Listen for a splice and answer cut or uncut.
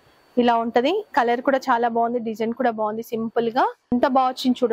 cut